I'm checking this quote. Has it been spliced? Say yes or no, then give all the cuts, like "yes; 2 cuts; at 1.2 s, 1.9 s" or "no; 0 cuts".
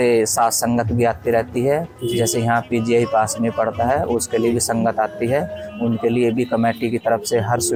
no; 0 cuts